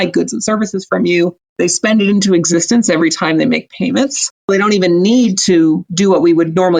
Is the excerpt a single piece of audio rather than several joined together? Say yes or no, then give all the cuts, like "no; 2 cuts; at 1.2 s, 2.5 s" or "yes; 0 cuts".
no; 2 cuts; at 1.4 s, 4.5 s